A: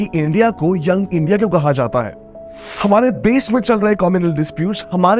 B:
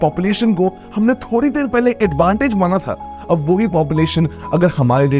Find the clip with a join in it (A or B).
A